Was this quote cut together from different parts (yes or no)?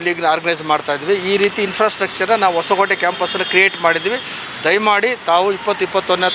no